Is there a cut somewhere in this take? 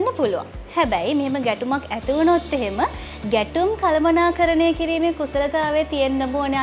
no; 0 cuts

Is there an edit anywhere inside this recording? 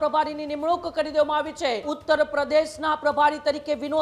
yes; 1 cut; at 1.9 s

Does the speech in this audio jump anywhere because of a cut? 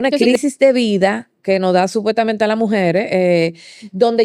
no; 0 cuts

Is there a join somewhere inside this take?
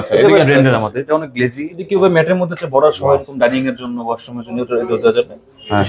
yes; 1 cut; at 1.8 s

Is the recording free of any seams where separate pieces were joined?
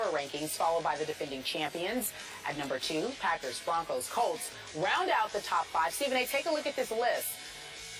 no; 1 cut; at 3.5 s

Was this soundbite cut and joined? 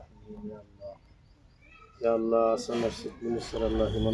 no; 0 cuts

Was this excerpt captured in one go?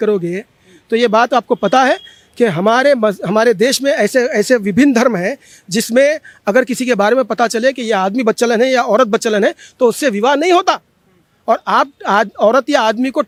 yes; 0 cuts

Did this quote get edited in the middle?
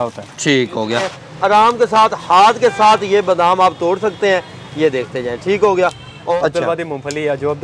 yes; 2 cuts; at 1.2 s, 6.3 s

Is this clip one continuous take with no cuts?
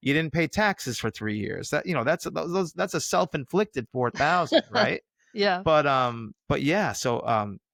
yes; 0 cuts

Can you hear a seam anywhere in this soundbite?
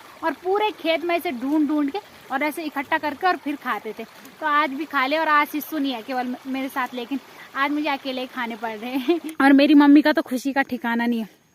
yes; 1 cut; at 9.3 s

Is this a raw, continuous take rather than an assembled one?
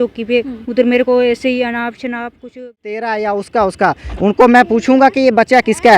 no; 1 cut; at 2.6 s

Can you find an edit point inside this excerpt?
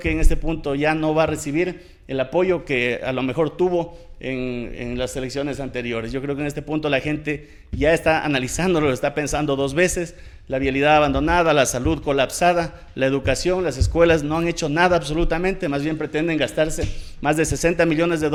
no; 0 cuts

